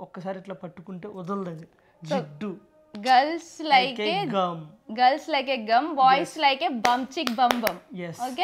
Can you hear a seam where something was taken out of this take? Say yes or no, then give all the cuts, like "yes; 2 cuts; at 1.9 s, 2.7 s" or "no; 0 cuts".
no; 0 cuts